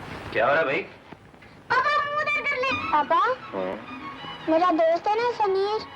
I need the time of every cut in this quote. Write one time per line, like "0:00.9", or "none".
0:02.8